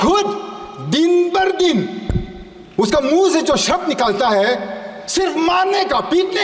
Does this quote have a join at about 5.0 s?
no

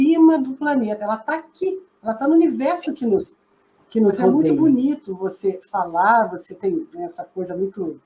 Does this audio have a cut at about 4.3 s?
yes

